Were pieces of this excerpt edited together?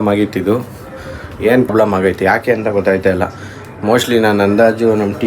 yes; 1 cut; at 1.7 s

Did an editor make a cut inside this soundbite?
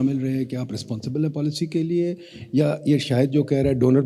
no; 0 cuts

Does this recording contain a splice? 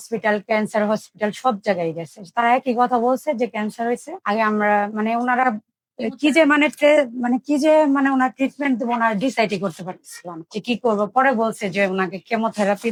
no; 0 cuts

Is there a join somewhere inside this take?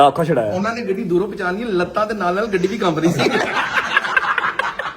yes; 1 cut; at 3.6 s

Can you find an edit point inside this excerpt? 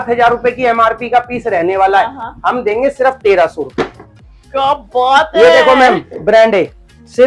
no; 0 cuts

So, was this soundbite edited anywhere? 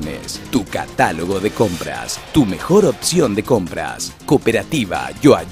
no; 0 cuts

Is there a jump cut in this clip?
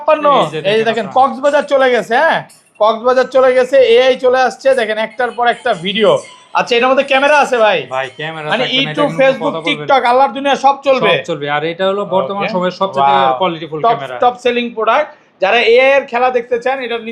no; 0 cuts

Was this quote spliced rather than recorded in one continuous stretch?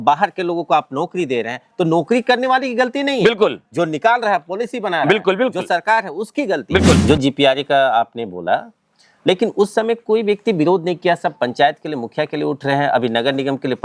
yes; 1 cut; at 7.0 s

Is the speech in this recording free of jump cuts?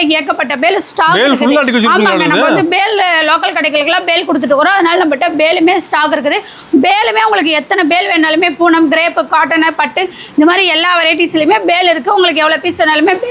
yes; 0 cuts

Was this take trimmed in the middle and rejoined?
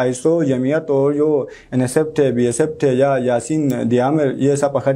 no; 0 cuts

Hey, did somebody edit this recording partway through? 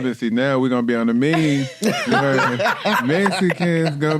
no; 0 cuts

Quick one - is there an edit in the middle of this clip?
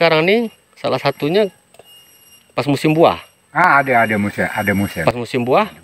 no; 0 cuts

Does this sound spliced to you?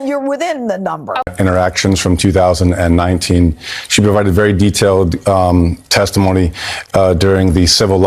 yes; 1 cut; at 1.3 s

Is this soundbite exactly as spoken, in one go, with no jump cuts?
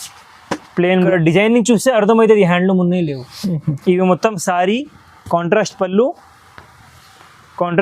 no; 1 cut; at 1.1 s

